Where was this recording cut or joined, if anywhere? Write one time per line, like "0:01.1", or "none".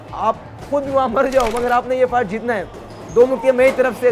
none

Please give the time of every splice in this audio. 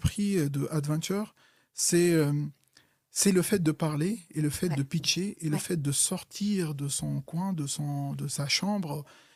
none

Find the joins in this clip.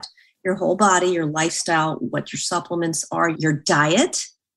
0:03.4

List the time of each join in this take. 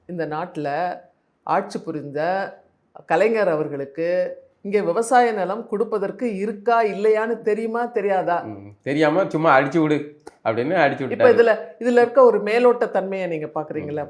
none

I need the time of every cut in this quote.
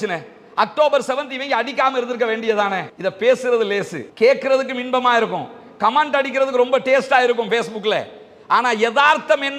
none

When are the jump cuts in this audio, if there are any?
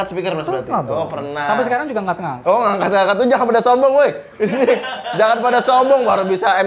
none

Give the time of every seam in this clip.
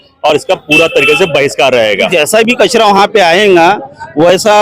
0:02.1

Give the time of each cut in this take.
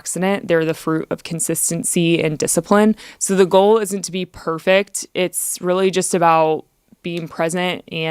0:03.1

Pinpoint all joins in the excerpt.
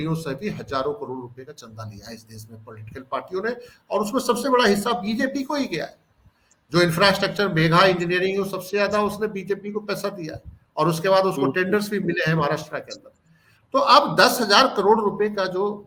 none

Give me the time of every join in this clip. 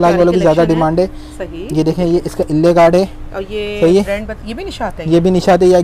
none

